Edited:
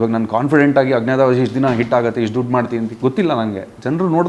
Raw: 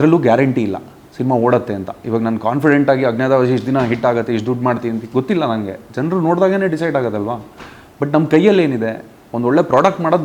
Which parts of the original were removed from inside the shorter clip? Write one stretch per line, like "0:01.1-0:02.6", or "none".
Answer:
none

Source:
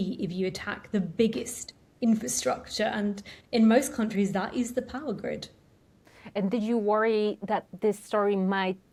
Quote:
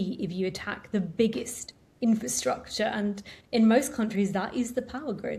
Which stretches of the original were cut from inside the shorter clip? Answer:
none

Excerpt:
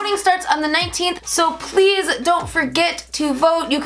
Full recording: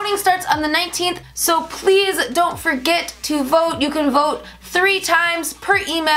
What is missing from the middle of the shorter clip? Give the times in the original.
0:01.2-0:01.3

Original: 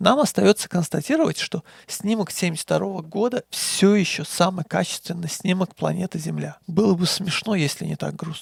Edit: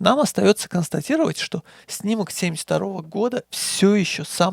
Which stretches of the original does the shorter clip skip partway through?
none

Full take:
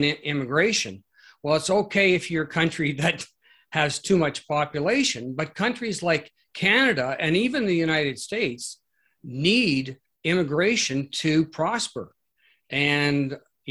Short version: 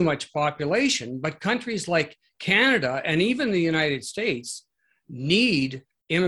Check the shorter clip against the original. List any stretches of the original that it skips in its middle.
none

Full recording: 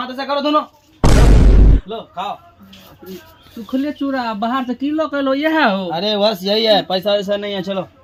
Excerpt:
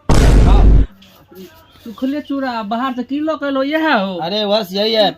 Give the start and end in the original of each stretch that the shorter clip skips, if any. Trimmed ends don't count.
0:01.8-0:02.6

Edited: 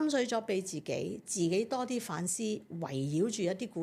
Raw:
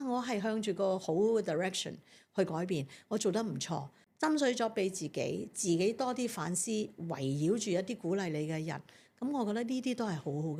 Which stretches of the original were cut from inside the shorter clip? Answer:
none

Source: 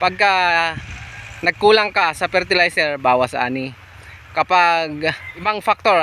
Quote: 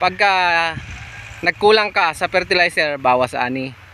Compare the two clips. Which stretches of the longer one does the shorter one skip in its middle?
none

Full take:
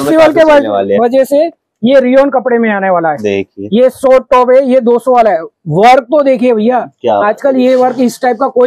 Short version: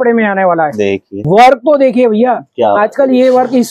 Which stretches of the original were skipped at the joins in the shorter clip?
0:03.5-0:05.6

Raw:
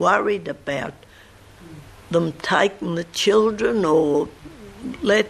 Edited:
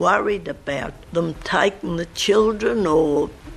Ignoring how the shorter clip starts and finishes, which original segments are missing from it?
0:01.0-0:02.0

